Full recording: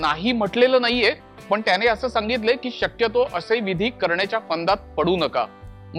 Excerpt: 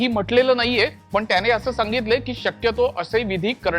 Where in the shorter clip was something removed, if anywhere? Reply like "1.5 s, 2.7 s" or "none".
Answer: 1.0 s